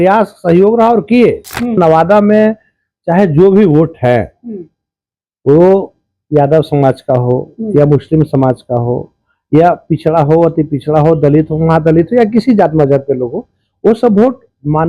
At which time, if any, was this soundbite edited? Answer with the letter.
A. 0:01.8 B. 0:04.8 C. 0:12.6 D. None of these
A